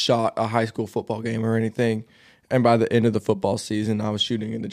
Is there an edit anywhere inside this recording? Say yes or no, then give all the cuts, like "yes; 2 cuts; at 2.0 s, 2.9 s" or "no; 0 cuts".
no; 0 cuts